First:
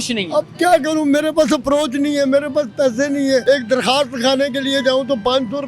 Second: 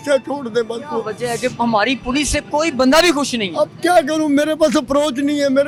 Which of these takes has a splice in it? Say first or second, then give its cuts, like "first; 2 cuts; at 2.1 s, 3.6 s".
first; 1 cut; at 3.4 s